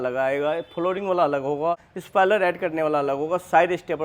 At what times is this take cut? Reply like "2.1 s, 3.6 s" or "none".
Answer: 1.9 s